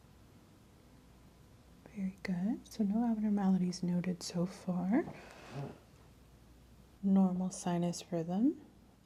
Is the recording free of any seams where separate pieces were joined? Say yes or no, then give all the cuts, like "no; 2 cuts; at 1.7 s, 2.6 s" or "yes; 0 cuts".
yes; 0 cuts